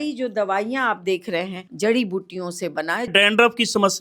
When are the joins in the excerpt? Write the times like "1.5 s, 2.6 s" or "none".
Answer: 1.6 s, 3.1 s